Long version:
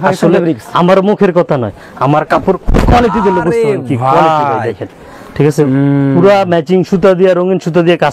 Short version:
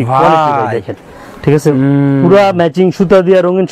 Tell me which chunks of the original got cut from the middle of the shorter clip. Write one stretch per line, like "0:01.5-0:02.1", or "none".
none